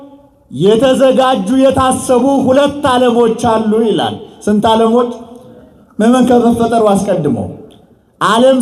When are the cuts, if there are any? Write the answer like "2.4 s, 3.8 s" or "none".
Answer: none